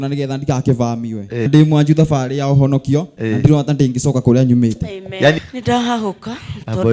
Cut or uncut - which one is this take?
cut